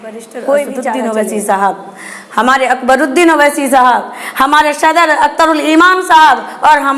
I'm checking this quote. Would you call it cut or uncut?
cut